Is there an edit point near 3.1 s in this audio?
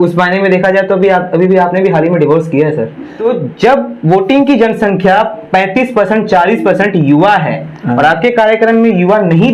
yes; 1 cut; at 3.1 s

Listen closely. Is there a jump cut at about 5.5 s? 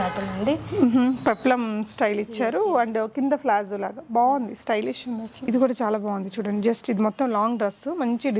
yes; 1 cut; at 5.5 s

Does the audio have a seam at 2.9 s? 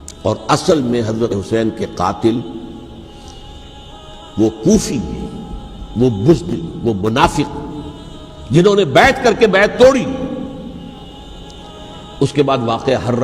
no; 2 cuts; at 1.3 s, 11.1 s

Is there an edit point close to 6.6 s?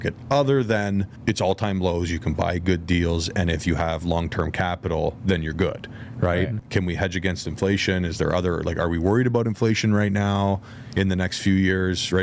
yes; 2 cuts; at 1.1 s, 6.6 s

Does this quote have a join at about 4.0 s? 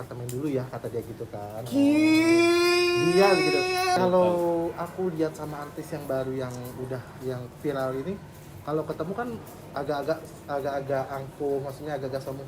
yes; 1 cut; at 4.0 s

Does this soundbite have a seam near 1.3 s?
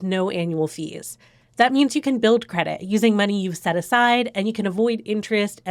no; 0 cuts

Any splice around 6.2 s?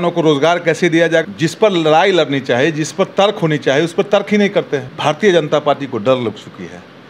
no; 2 cuts; at 1.3 s, 4.9 s

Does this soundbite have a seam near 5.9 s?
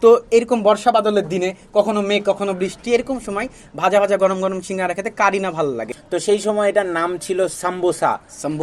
yes; 1 cut; at 5.9 s

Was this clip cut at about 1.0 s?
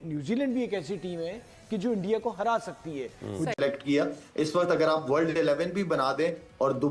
no; 1 cut; at 3.6 s

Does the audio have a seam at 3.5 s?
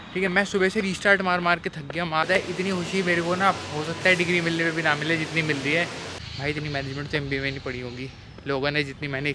no; 2 cuts; at 2.2 s, 6.1 s

